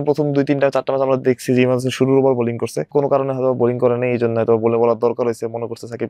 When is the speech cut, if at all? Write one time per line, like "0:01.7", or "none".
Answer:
0:02.9

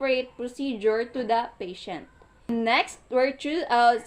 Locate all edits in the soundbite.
0:02.5

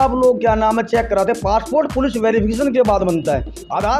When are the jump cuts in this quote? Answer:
none

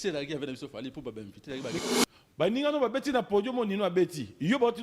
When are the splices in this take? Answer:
0:01.8

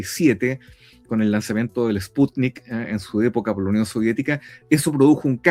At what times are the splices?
none

